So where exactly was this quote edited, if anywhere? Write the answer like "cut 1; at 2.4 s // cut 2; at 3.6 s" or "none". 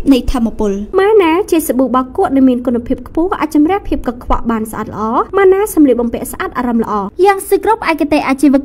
cut 1; at 0.8 s // cut 2; at 7.0 s